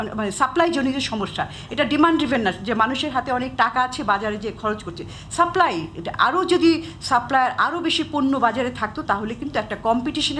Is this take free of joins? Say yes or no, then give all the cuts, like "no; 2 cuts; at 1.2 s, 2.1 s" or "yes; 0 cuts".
yes; 0 cuts